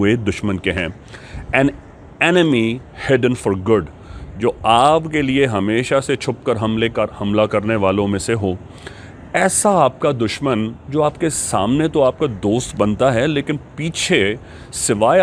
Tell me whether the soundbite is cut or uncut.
uncut